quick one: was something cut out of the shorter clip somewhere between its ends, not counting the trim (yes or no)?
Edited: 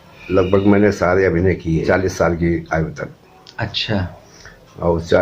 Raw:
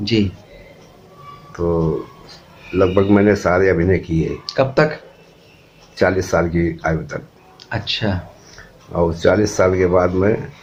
yes